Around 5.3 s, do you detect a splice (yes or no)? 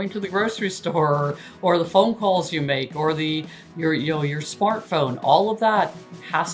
no